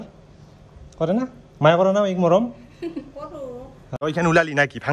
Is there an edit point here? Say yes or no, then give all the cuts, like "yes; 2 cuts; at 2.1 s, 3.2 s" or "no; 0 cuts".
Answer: yes; 1 cut; at 4.0 s